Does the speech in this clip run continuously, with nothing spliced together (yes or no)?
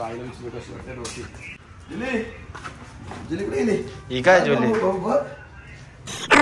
yes